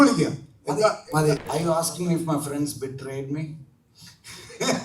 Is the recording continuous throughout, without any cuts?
no; 1 cut; at 1.4 s

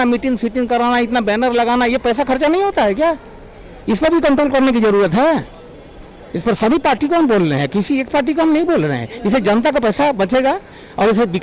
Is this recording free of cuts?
yes; 0 cuts

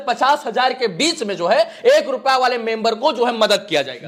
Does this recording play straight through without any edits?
yes; 0 cuts

